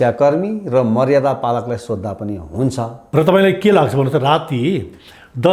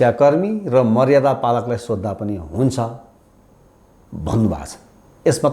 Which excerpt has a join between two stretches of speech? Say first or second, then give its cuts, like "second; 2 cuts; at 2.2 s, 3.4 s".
first; 1 cut; at 3.0 s